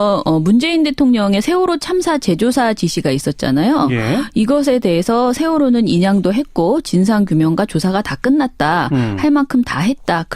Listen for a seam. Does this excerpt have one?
yes; 1 cut; at 8.5 s

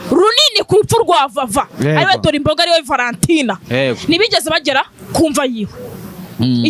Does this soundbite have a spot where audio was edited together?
no; 0 cuts

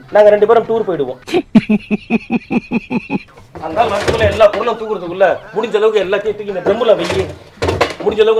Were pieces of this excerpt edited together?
yes; 1 cut; at 3.2 s

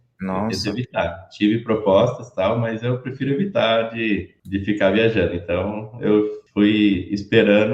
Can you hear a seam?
yes; 2 cuts; at 4.4 s, 6.4 s

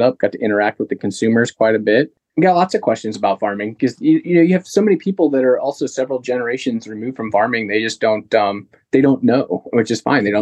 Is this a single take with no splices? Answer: no; 1 cut; at 2.2 s

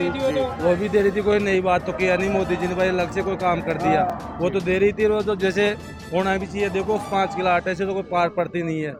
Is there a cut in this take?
no; 0 cuts

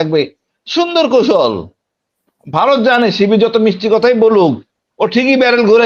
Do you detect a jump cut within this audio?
no; 0 cuts

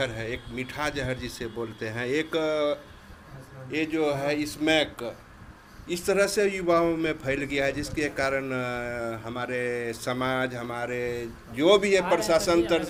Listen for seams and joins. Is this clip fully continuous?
yes; 0 cuts

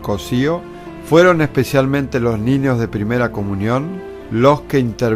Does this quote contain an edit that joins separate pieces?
yes; 1 cut; at 2.4 s

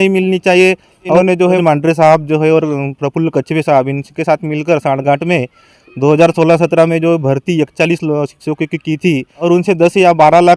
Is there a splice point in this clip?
yes; 2 cuts; at 1.2 s, 9.4 s

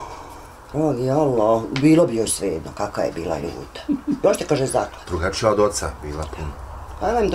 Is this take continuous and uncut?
yes; 0 cuts

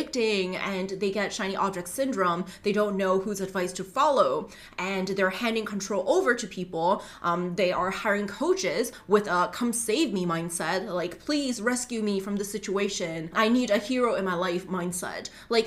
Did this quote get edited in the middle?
yes; 1 cut; at 13.3 s

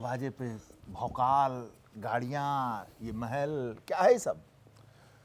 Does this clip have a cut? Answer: no; 0 cuts

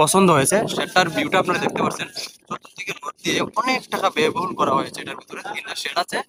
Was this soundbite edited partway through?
no; 0 cuts

